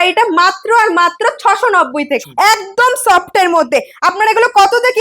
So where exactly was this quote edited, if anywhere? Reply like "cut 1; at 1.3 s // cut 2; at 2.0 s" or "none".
cut 1; at 2.2 s